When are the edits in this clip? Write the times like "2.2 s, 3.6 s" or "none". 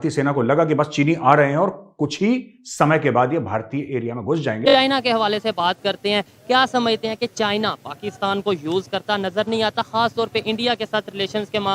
4.6 s